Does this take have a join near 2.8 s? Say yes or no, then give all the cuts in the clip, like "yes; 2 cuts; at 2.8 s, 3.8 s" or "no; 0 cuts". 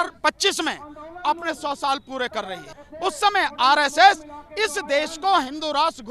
yes; 1 cut; at 2.8 s